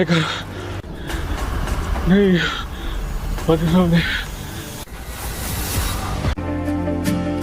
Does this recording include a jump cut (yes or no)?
yes